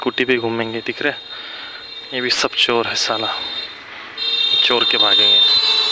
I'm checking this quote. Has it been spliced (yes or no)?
no